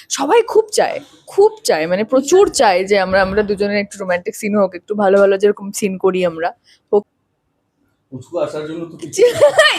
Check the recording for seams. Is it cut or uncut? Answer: cut